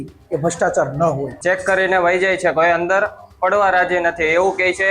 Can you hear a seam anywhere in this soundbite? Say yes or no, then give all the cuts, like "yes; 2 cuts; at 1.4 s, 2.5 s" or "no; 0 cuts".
yes; 1 cut; at 1.3 s